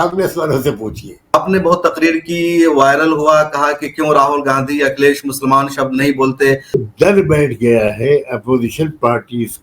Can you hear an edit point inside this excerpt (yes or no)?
yes